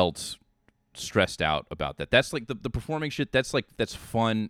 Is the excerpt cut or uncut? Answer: uncut